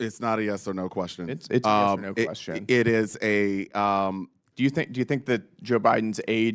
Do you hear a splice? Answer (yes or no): yes